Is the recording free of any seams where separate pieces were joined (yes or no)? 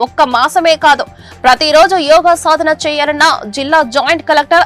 yes